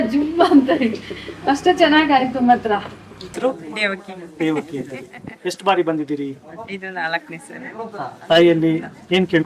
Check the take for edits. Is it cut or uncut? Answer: cut